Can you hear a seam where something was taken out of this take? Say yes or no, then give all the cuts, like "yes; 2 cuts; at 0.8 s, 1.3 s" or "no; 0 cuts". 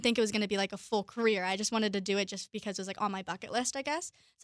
no; 0 cuts